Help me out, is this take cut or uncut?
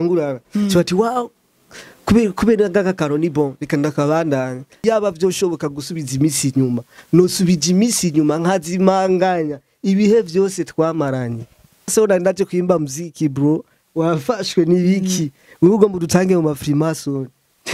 cut